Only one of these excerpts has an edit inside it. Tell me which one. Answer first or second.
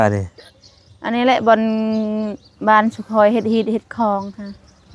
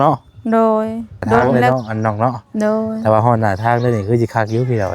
second